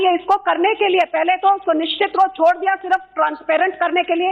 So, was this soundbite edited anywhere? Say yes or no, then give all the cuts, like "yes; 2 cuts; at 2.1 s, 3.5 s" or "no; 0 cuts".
yes; 1 cut; at 1.1 s